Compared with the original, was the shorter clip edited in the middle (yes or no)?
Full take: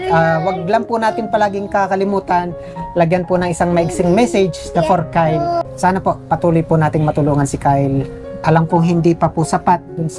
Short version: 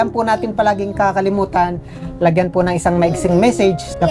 no